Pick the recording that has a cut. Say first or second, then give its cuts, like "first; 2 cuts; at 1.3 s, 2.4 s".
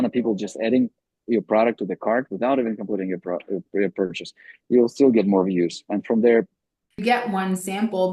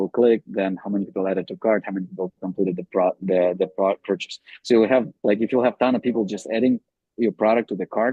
first; 1 cut; at 7.0 s